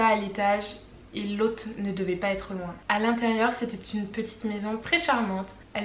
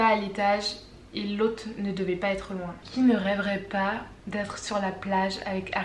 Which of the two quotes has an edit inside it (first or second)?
second